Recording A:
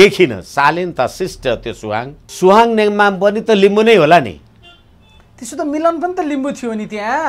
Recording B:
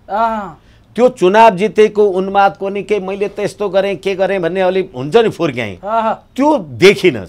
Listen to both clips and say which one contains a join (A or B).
A